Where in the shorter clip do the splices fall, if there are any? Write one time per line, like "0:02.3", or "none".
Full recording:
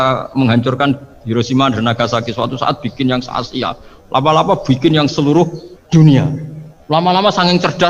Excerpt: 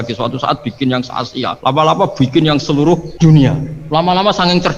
0:01.5
0:03.1
0:03.7